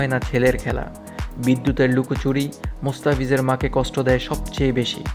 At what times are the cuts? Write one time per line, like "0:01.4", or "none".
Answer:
none